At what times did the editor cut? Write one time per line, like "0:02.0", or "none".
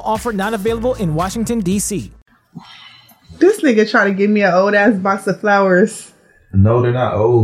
0:02.1